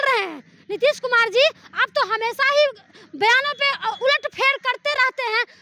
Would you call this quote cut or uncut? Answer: uncut